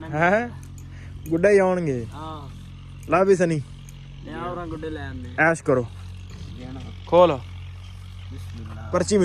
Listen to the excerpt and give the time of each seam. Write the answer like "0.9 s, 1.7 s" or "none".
none